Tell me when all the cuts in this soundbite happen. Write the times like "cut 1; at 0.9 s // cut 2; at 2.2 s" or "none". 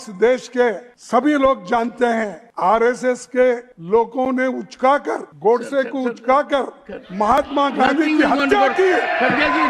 cut 1; at 0.9 s // cut 2; at 2.4 s // cut 3; at 3.7 s // cut 4; at 5.3 s